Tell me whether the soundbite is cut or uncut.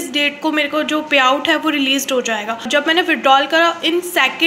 cut